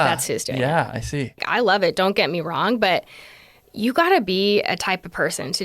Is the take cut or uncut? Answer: cut